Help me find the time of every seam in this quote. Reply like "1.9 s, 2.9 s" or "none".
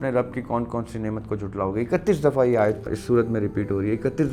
2.9 s